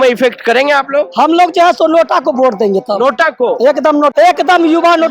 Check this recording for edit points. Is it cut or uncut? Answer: cut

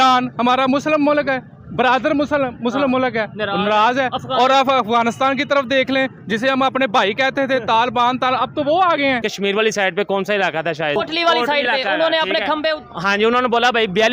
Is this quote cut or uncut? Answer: cut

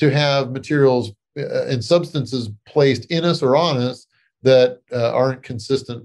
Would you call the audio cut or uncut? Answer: cut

